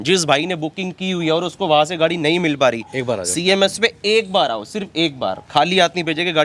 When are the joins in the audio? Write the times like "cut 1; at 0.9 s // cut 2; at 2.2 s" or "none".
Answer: none